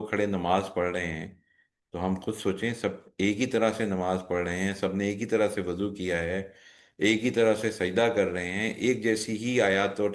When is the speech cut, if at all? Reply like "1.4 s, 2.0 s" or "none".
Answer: none